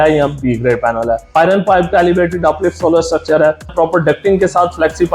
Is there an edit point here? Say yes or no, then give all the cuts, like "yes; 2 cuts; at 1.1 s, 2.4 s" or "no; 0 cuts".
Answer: yes; 2 cuts; at 1.4 s, 3.7 s